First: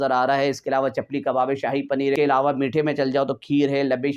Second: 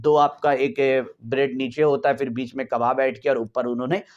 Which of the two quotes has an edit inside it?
first; 1 cut; at 2.1 s

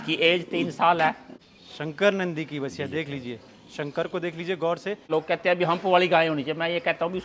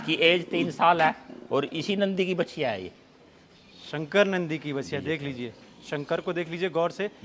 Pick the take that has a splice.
first; 2 cuts; at 1.3 s, 5.1 s

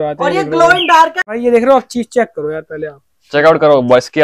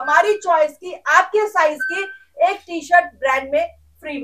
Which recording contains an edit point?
first; 1 cut; at 1.3 s

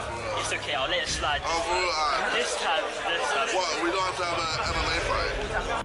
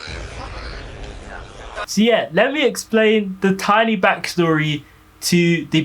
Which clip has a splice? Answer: second; 1 cut; at 1.9 s

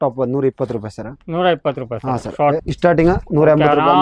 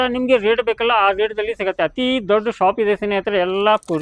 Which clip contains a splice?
first; 1 cut; at 2.6 s

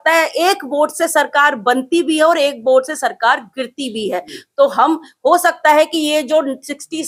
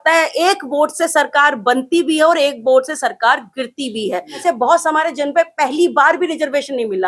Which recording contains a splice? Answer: second; 1 cut; at 4.4 s

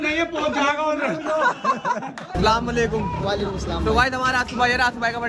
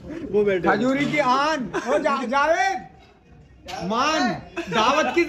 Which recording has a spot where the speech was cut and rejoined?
first; 1 cut; at 2.4 s

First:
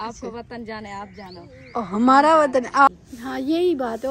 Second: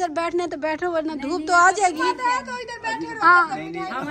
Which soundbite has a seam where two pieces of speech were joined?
first; 1 cut; at 2.9 s

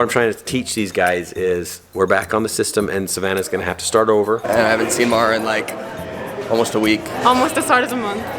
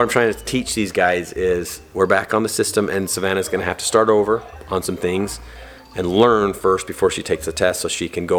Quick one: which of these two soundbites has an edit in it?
first; 2 cuts; at 4.4 s, 7.1 s

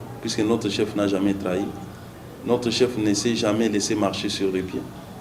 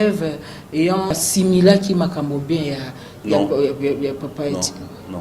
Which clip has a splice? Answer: second; 1 cut; at 1.2 s

